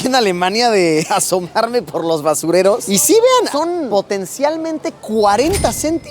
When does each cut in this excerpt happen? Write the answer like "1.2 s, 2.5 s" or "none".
1.1 s, 3.5 s